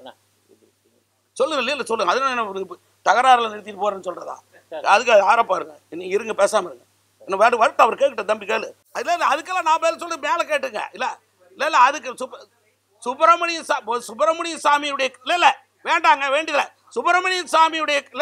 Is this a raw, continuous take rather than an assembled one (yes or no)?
no